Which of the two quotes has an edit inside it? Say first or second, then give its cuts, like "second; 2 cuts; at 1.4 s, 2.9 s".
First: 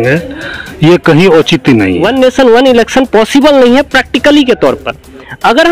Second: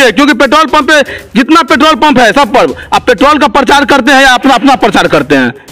first; 1 cut; at 2.0 s